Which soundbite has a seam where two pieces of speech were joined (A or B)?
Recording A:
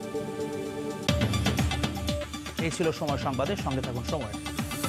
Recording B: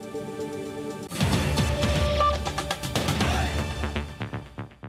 B